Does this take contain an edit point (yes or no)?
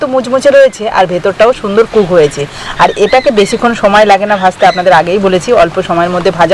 no